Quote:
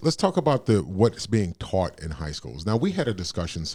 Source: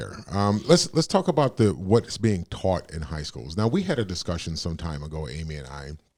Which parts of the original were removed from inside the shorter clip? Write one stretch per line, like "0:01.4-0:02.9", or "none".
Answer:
none